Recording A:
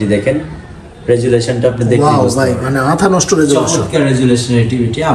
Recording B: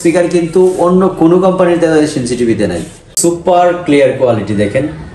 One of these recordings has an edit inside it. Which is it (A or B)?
B